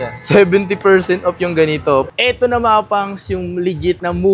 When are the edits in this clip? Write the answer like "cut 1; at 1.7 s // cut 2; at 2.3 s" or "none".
cut 1; at 2.1 s